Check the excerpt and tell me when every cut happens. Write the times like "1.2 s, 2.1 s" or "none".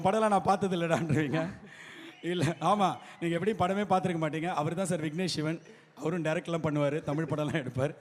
none